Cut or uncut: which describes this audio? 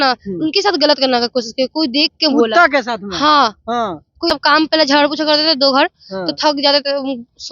cut